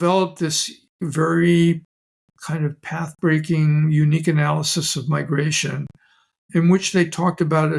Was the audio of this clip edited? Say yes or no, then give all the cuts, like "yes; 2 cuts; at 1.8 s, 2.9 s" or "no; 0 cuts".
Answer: yes; 1 cut; at 1.0 s